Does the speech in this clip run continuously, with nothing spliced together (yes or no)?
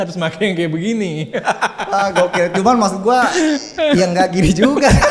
yes